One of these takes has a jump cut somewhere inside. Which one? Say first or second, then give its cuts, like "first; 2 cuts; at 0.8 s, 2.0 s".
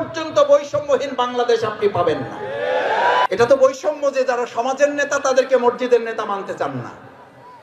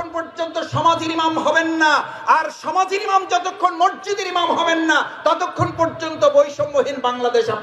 first; 1 cut; at 3.3 s